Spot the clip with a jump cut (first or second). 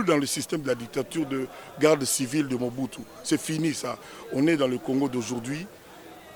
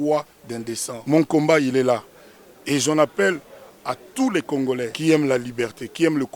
second